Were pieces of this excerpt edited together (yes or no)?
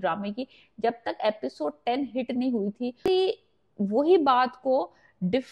yes